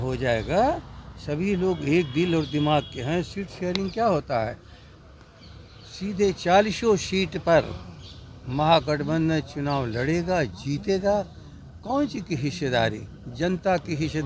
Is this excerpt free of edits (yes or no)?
yes